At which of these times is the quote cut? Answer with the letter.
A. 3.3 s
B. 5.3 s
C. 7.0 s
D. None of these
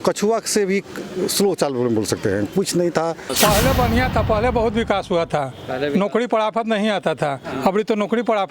A